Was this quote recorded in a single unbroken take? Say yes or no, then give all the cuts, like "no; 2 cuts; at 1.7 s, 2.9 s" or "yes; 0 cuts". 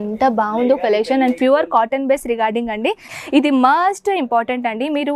no; 1 cut; at 3.2 s